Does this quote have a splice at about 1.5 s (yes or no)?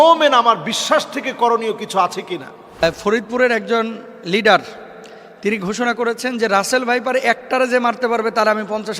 no